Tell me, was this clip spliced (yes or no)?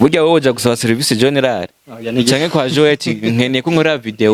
no